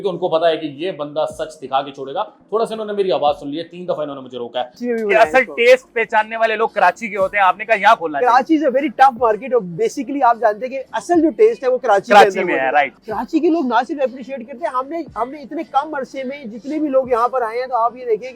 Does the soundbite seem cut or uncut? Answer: cut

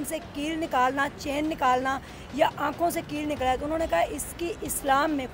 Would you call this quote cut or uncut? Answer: uncut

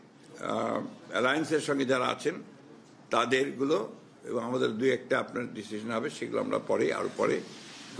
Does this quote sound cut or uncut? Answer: uncut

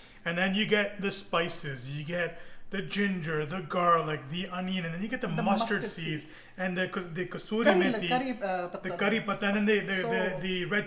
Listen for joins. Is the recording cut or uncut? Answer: uncut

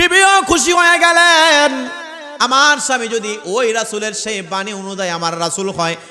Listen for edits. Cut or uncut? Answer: uncut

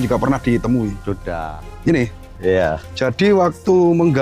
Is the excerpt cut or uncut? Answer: cut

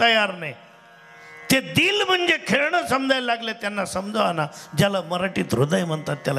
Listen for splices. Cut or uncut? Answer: uncut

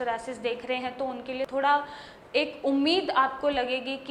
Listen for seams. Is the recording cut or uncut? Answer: cut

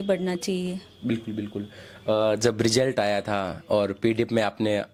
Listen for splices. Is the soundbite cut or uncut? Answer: uncut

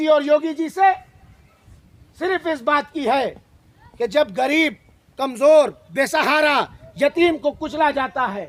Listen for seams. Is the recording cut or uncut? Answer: uncut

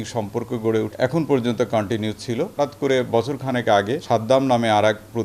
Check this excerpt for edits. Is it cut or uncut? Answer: cut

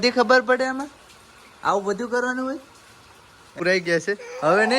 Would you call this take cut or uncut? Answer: cut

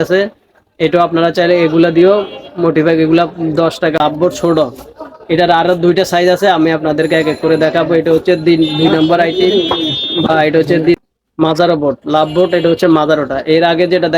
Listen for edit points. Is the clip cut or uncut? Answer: cut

